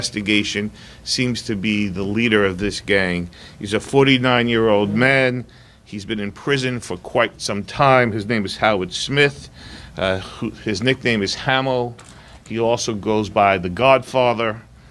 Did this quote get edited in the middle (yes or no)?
no